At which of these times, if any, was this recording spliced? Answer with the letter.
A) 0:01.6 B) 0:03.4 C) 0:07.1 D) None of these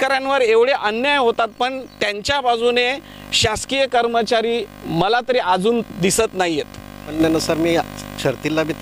C